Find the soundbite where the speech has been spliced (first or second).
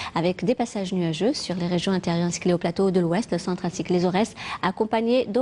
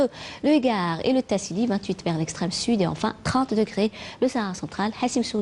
first